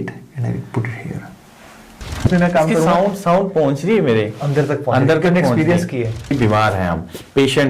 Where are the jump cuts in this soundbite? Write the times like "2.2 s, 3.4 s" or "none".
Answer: 2.2 s, 6.3 s